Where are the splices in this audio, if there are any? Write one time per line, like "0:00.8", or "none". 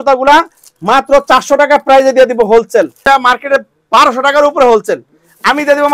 0:03.0

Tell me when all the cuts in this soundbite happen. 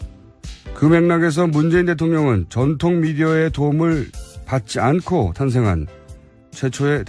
0:03.7

